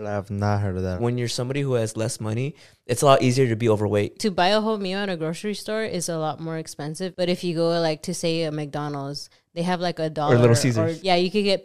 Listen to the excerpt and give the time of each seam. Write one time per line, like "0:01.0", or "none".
0:01.1
0:10.0